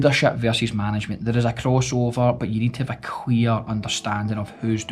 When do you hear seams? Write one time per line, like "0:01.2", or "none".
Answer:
none